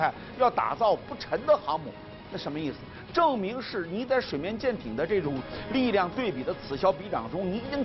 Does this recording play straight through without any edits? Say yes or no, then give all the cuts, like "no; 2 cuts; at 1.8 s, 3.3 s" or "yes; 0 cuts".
yes; 0 cuts